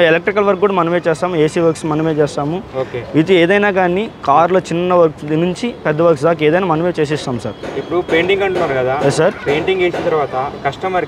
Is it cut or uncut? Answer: uncut